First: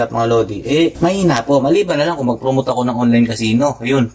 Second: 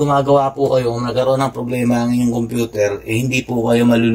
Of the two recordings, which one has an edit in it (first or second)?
first